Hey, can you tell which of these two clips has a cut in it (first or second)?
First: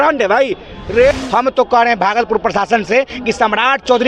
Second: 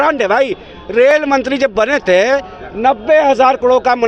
first